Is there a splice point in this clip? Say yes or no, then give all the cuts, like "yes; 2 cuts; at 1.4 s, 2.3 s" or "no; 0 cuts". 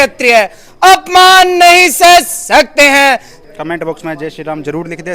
yes; 1 cut; at 3.4 s